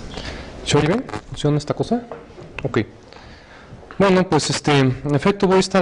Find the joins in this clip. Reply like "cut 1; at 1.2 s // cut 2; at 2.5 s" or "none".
cut 1; at 1.2 s